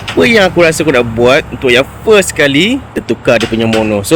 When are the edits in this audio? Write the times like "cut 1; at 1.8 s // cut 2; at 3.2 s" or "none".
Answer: cut 1; at 3.0 s